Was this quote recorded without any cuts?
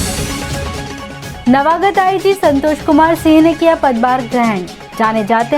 no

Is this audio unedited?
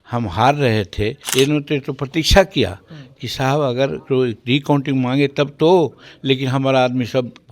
no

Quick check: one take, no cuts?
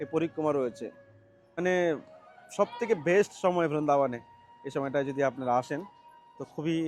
no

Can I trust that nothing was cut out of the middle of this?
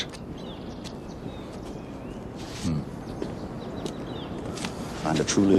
yes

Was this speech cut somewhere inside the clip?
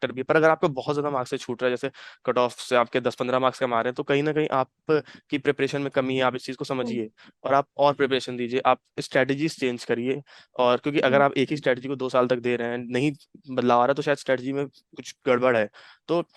no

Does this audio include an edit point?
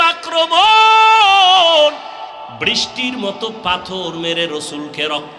yes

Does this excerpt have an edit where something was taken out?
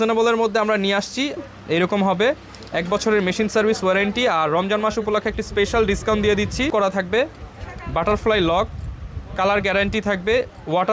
yes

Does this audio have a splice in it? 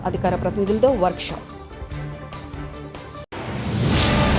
no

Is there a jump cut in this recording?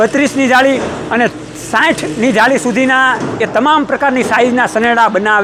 no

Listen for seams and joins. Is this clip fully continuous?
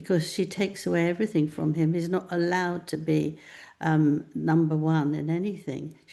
yes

